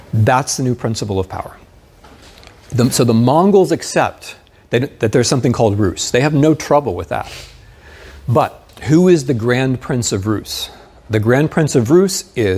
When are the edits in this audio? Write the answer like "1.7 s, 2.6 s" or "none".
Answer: none